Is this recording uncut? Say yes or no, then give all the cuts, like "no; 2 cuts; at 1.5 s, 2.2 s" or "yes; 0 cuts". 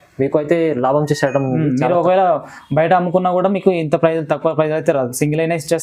yes; 0 cuts